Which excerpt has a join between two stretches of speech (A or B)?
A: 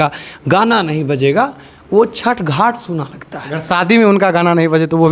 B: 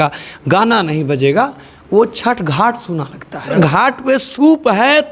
B